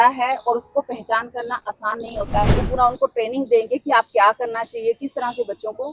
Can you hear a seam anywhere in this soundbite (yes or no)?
yes